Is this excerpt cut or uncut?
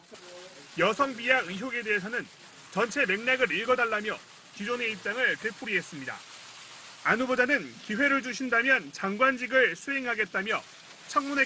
cut